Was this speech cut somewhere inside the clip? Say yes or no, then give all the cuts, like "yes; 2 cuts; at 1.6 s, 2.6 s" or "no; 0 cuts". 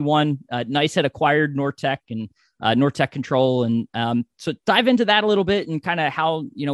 no; 0 cuts